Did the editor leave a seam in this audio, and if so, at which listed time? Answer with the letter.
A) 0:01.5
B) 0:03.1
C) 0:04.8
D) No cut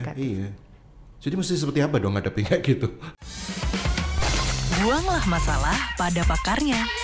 B